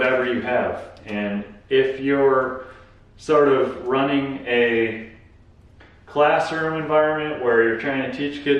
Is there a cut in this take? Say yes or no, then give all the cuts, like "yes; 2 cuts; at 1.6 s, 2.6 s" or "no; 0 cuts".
no; 0 cuts